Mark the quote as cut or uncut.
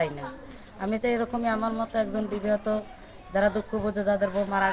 uncut